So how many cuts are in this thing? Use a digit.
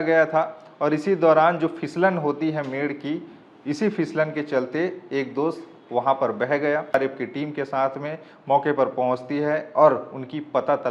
1